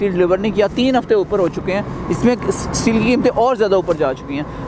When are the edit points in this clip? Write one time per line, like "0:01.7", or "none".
none